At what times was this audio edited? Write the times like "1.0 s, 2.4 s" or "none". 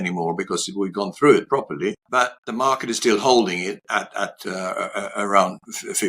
2.3 s